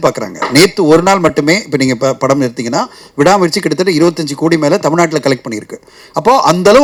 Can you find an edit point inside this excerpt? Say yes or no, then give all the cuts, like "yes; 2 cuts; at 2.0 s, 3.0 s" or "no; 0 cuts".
no; 0 cuts